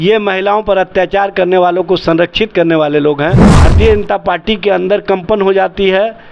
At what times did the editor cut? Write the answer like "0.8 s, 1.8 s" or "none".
3.5 s